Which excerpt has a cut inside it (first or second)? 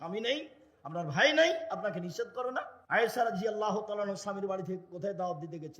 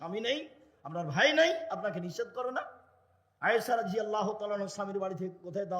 first